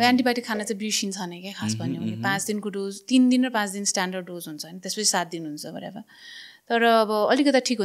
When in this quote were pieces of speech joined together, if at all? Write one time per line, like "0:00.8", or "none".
none